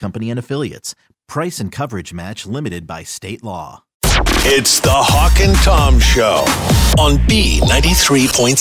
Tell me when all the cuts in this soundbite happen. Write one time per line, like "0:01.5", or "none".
0:03.9

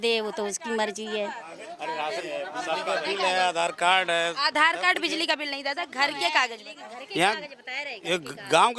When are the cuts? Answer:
none

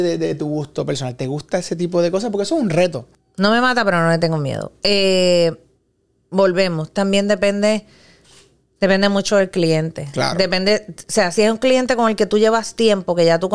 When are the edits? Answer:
0:03.1

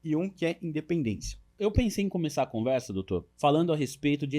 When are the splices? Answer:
0:01.5
0:03.3

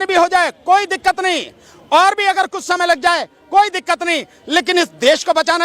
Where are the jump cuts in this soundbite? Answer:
none

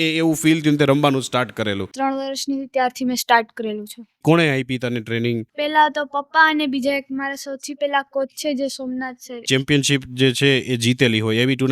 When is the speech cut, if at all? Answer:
0:01.9
0:04.2
0:09.4

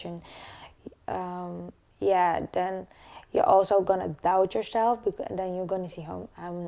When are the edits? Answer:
none

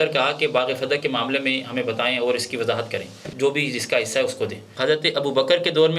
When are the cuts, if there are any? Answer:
0:03.3
0:04.6

